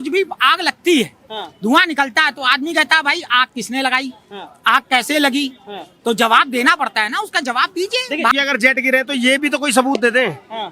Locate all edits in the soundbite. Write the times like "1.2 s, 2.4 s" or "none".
8.3 s